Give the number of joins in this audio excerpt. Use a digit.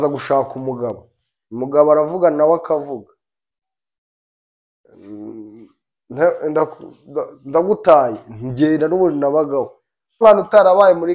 1